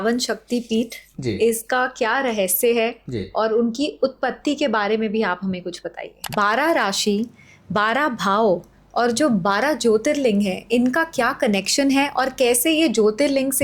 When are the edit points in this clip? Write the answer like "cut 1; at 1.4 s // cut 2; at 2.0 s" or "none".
cut 1; at 6.2 s

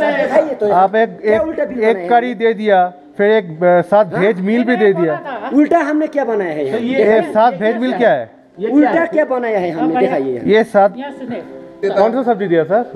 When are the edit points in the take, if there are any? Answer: cut 1; at 11.8 s

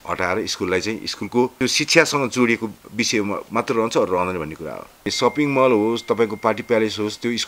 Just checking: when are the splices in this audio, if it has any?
cut 1; at 1.5 s // cut 2; at 5.0 s

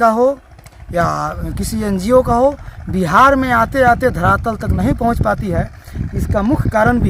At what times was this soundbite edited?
cut 1; at 4.1 s

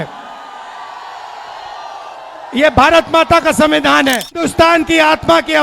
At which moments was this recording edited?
cut 1; at 4.5 s

